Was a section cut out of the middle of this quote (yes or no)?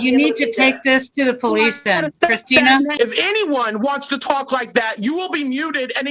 yes